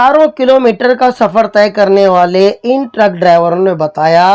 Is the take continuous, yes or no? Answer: yes